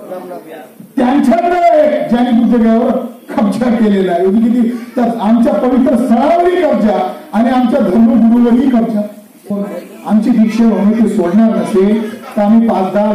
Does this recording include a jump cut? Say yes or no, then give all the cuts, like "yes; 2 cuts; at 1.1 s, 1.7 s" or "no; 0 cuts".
yes; 1 cut; at 9.6 s